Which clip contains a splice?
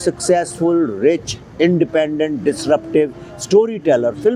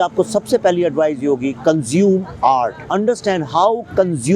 second; 1 cut; at 2.8 s

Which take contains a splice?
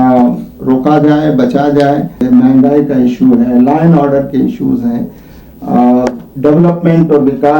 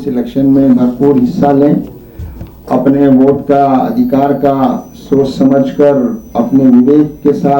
first; 1 cut; at 2.1 s

